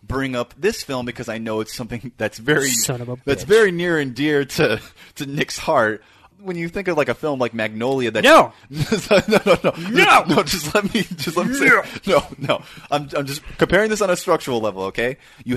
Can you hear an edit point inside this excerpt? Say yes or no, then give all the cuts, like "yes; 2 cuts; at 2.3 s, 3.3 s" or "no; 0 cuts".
yes; 1 cut; at 6.3 s